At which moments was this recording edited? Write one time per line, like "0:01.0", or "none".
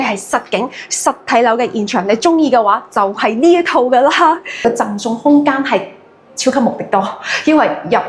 0:04.6